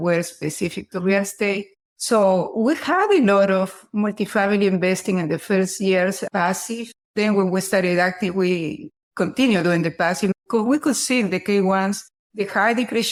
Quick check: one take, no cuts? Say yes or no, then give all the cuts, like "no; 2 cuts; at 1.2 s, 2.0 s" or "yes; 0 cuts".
yes; 0 cuts